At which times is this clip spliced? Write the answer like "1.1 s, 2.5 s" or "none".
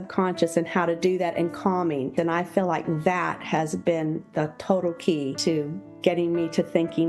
2.1 s, 5.4 s